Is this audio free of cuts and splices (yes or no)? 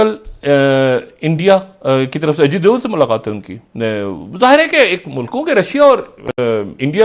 yes